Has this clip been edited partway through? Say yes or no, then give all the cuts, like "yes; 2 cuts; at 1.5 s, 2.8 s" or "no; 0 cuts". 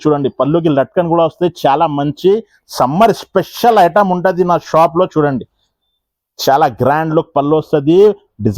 no; 0 cuts